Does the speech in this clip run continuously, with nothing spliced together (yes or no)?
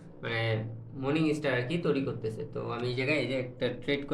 yes